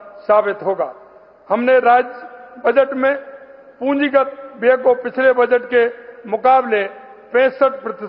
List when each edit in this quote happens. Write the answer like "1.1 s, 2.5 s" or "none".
none